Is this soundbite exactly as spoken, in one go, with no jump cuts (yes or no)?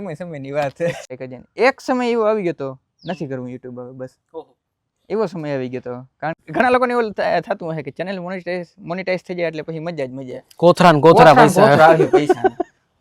no